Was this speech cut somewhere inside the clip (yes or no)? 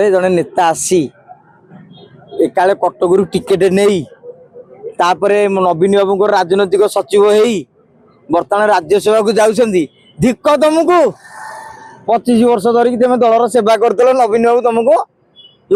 no